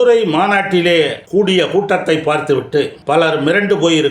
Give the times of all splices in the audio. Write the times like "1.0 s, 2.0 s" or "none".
1.2 s, 3.0 s